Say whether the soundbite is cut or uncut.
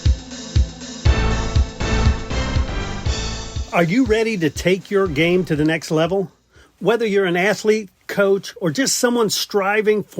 cut